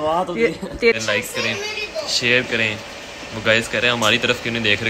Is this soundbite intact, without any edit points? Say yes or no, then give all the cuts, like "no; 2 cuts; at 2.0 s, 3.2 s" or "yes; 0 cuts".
no; 1 cut; at 0.9 s